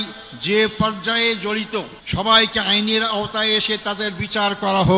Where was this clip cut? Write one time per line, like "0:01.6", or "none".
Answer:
0:02.0